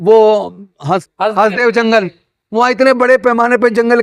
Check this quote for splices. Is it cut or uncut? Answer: cut